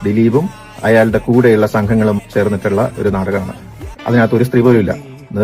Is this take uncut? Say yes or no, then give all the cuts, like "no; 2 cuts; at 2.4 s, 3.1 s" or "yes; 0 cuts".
yes; 0 cuts